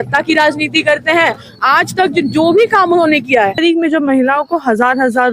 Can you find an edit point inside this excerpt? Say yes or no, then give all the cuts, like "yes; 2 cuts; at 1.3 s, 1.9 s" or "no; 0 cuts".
yes; 1 cut; at 3.6 s